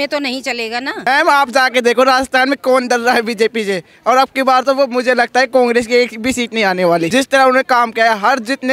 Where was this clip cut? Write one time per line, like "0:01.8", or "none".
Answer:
0:01.1
0:07.1